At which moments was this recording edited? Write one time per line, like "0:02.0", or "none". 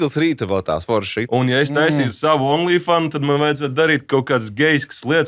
0:01.2